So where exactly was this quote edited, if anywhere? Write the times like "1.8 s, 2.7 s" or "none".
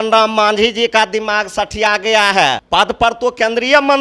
2.6 s